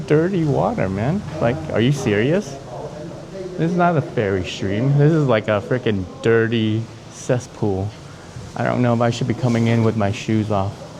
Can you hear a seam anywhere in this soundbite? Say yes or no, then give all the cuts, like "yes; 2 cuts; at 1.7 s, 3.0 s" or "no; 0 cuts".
no; 0 cuts